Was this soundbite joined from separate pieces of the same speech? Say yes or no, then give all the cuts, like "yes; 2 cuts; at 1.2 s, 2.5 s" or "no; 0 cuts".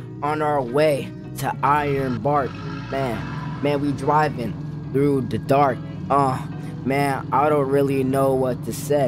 no; 0 cuts